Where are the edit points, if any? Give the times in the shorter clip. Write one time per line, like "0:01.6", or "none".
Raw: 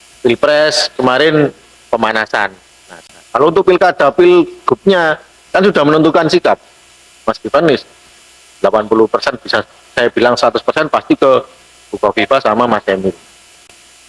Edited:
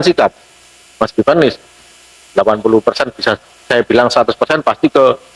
none

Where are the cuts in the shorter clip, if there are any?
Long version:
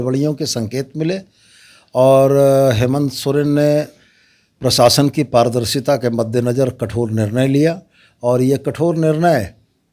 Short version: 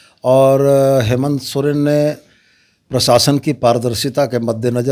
none

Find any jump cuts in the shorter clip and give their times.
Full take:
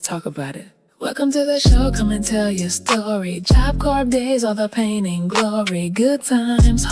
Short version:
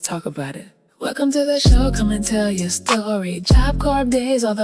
none

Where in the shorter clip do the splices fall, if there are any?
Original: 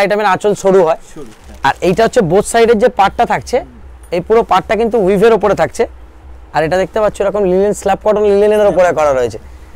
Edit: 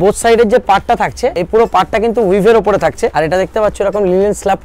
0:01.4
0:03.1

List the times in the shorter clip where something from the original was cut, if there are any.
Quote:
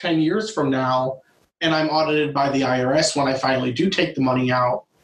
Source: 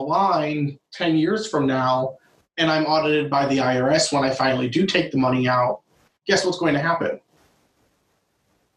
none

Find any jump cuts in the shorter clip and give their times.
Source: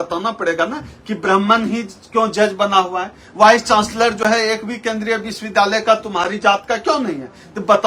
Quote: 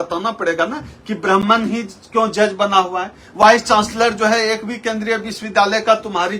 none

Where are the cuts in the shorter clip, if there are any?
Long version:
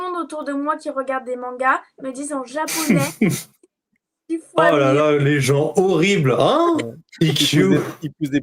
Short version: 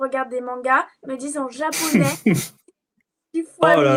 none

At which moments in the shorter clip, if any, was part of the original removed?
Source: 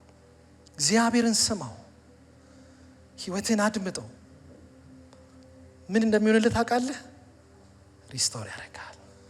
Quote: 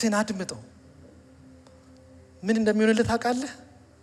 none

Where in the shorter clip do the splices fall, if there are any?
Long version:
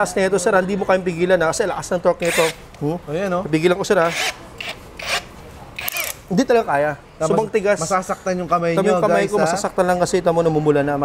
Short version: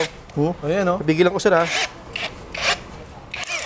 none

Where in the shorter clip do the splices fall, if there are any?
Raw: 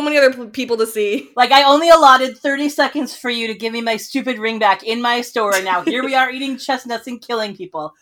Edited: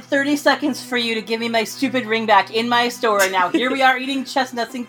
none

